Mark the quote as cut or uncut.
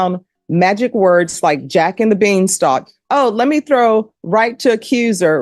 uncut